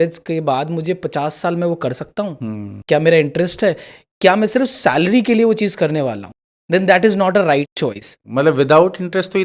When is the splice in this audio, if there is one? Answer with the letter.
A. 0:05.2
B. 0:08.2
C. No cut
B